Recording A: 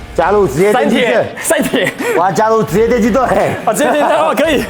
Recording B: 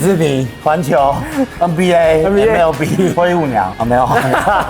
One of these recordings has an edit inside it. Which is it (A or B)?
B